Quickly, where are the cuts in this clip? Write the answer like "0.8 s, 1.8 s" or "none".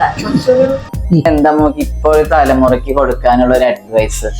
1.2 s